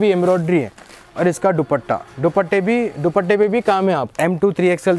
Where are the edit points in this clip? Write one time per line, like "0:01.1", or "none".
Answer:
0:04.1